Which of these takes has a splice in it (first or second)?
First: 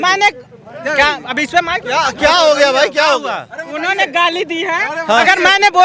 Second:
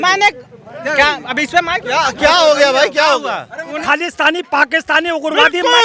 second